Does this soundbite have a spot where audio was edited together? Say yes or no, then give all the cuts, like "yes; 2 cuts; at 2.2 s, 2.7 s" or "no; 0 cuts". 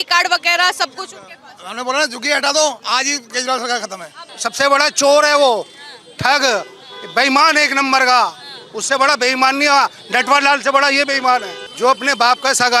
yes; 2 cuts; at 4.3 s, 11.6 s